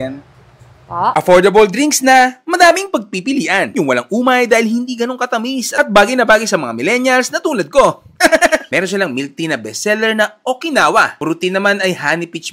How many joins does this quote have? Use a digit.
0